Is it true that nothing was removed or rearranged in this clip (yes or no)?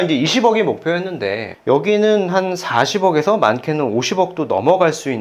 yes